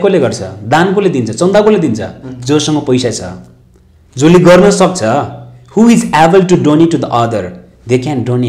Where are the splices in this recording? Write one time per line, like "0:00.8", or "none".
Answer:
none